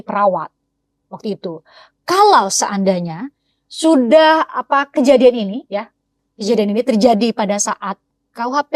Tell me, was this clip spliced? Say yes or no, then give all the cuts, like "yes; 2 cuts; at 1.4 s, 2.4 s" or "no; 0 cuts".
no; 0 cuts